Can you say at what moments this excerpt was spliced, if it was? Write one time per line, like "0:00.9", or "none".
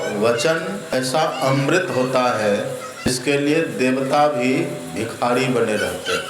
0:00.9
0:03.2